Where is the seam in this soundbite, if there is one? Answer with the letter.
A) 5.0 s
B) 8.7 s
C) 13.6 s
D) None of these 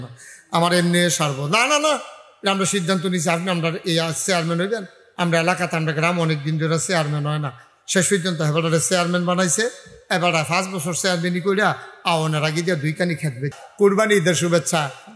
C